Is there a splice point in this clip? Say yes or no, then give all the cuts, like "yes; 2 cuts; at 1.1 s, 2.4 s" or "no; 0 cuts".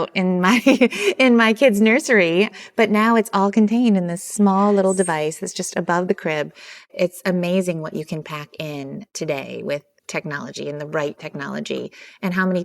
yes; 2 cuts; at 6.9 s, 9.1 s